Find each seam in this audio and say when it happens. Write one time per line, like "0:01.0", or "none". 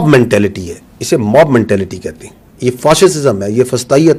none